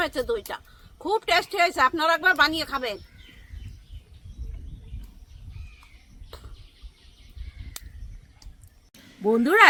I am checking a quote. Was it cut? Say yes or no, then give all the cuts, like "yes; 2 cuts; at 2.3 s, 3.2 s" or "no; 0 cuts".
no; 0 cuts